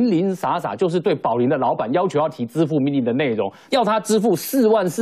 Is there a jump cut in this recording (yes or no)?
yes